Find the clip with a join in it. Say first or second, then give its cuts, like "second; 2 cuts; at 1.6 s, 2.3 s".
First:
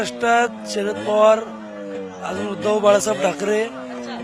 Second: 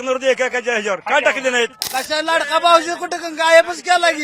second; 1 cut; at 1.8 s